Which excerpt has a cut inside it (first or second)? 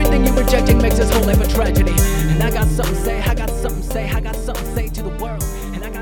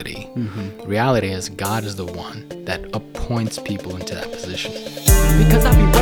second